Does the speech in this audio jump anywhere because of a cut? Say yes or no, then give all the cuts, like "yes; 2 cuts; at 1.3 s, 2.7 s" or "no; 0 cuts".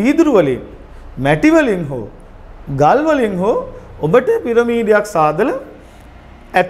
no; 0 cuts